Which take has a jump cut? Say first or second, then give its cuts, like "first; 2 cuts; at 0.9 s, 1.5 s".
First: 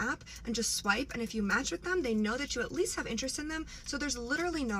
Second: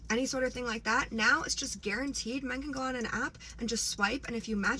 second; 1 cut; at 2.0 s